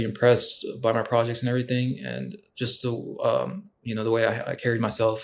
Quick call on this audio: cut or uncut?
uncut